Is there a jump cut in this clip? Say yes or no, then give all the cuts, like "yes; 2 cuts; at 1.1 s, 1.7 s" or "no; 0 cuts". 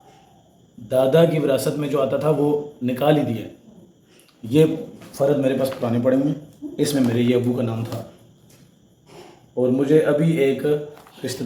no; 0 cuts